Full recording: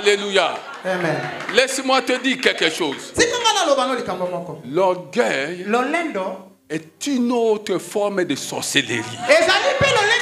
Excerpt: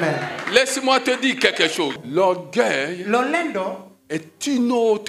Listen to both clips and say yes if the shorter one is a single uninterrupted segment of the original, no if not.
no